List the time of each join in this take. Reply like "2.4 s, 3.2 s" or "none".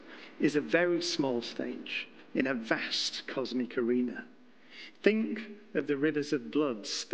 none